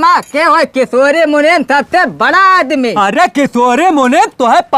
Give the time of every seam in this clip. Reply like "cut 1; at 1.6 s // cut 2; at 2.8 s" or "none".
none